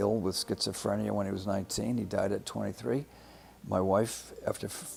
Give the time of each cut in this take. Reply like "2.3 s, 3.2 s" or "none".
none